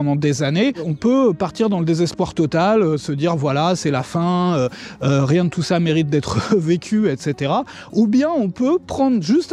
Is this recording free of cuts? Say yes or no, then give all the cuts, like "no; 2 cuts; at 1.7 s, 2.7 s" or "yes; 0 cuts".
no; 1 cut; at 0.9 s